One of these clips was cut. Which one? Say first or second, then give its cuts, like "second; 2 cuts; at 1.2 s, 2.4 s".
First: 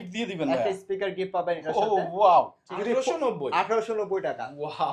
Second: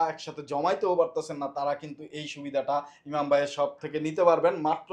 first; 1 cut; at 2.6 s